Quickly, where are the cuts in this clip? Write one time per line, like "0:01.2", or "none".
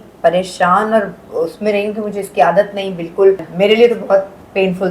0:03.5